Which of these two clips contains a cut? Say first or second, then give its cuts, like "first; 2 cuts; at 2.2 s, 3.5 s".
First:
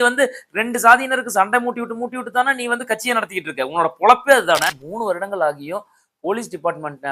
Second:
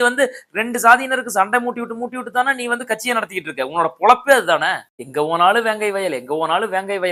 first; 1 cut; at 4.8 s